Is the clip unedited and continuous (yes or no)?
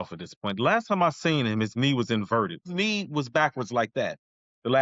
no